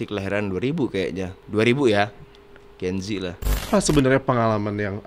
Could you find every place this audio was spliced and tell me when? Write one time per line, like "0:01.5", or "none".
0:01.4
0:03.7